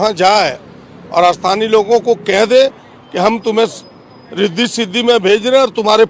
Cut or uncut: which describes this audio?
uncut